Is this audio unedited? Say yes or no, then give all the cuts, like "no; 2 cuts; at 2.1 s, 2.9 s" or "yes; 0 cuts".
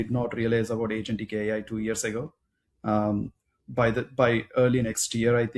yes; 0 cuts